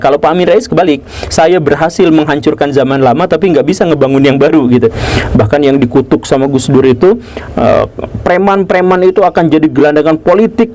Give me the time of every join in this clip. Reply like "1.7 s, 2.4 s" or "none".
5.0 s